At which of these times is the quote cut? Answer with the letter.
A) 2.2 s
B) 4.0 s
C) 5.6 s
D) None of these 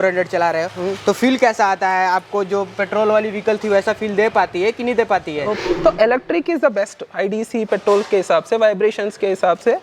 C